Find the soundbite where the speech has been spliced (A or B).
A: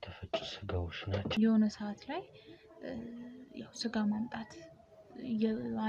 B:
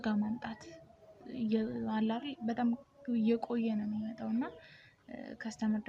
A